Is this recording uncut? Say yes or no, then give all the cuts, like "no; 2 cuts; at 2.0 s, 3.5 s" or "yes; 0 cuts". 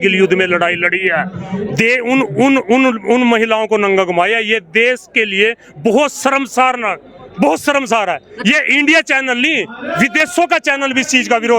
yes; 0 cuts